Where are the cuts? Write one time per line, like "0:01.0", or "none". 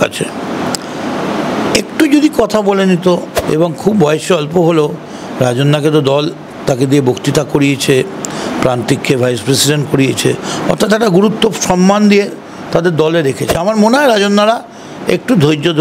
0:03.4
0:13.6